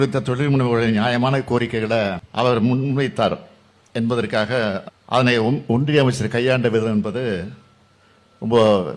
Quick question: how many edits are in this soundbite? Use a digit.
2